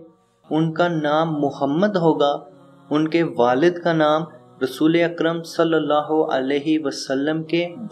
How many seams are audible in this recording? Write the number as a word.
zero